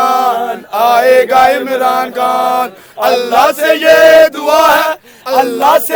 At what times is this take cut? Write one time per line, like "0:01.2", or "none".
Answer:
none